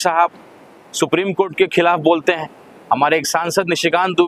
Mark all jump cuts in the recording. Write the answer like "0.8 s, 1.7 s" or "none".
none